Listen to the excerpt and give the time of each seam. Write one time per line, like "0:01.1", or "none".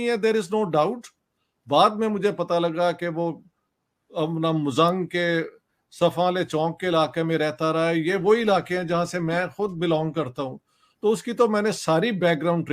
none